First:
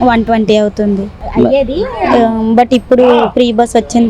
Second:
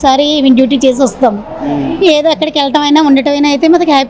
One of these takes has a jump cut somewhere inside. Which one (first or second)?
first